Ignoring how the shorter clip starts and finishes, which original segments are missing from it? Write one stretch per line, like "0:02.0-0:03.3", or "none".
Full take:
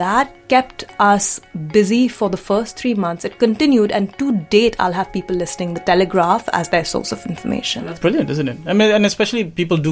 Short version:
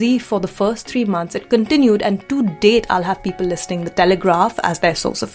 none